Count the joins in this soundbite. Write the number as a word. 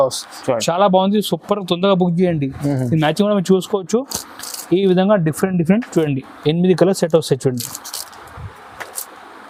zero